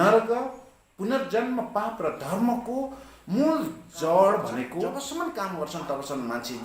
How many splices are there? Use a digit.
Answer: 1